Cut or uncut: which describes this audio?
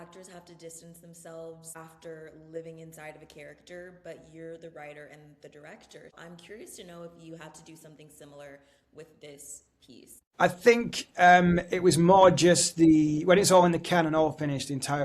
cut